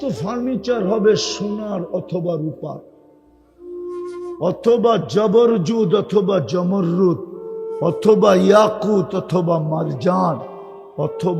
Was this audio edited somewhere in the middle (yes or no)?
no